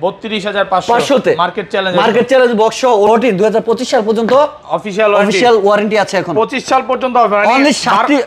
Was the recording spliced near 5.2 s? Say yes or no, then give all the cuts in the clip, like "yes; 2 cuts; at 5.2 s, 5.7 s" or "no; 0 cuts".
no; 1 cut; at 3.1 s